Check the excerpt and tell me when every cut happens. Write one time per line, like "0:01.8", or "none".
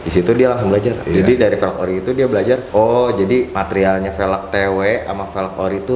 0:01.0
0:02.6
0:03.6

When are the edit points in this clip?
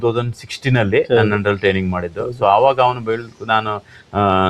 none

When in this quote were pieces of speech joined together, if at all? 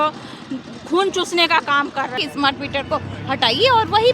0:02.1

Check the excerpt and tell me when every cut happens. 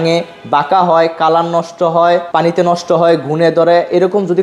0:02.3

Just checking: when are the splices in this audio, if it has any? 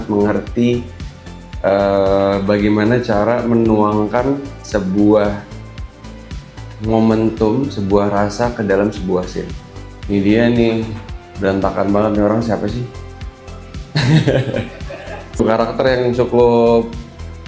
0:09.9
0:15.4

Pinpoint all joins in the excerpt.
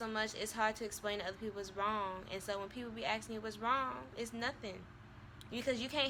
none

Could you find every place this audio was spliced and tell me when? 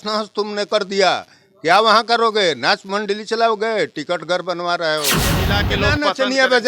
0:05.5

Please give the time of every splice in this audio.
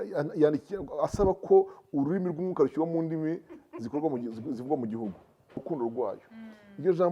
0:05.6

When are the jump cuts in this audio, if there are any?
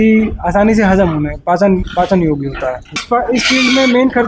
0:03.0

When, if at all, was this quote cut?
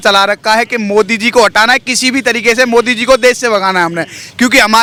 none

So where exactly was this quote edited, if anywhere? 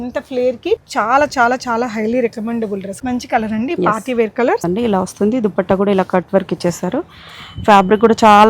0:00.8
0:03.0
0:04.6

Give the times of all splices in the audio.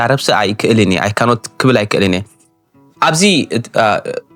none

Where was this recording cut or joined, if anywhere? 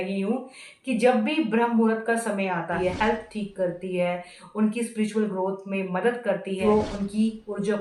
0:02.8
0:06.6

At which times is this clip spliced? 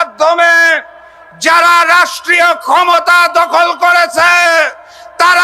none

